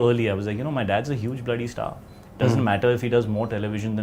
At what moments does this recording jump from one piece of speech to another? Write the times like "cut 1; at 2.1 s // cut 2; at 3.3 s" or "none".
none